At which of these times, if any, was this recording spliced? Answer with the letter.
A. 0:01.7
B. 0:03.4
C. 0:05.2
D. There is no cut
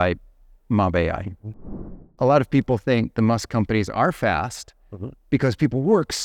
A